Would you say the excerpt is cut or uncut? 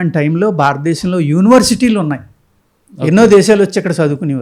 uncut